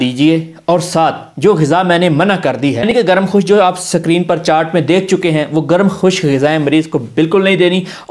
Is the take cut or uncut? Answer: cut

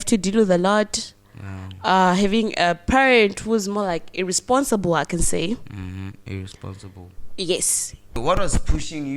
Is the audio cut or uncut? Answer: cut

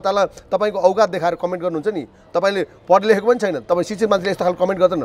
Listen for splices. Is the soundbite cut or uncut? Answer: uncut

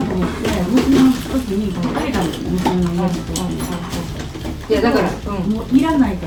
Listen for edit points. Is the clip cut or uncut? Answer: uncut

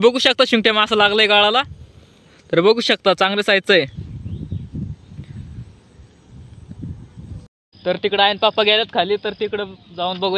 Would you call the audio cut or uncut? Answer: uncut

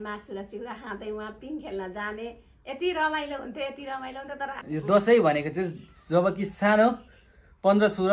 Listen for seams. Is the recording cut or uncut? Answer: cut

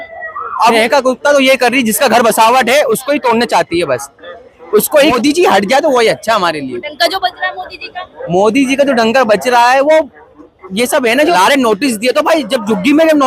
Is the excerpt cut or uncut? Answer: cut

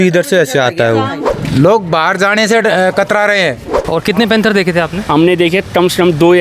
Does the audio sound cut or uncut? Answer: cut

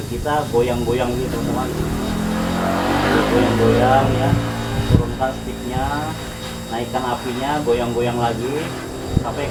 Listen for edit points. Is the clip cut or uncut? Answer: uncut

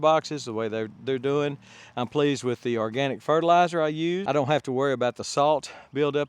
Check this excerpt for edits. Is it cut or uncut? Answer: cut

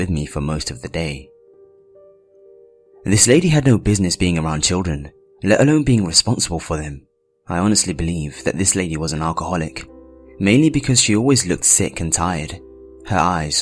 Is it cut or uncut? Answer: uncut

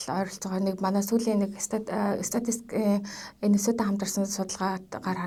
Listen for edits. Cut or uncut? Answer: uncut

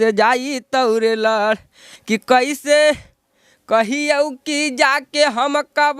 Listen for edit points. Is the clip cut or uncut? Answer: uncut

